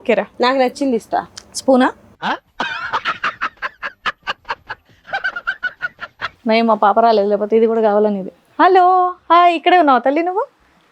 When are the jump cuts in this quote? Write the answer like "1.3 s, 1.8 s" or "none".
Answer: 6.4 s